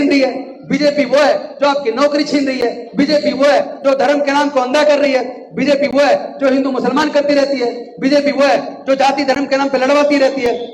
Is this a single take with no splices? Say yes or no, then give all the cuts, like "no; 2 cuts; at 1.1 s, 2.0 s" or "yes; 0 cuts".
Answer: yes; 0 cuts